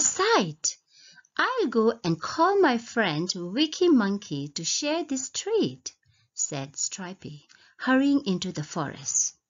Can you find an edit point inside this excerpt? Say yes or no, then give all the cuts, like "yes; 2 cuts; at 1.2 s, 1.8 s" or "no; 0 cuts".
yes; 1 cut; at 2.9 s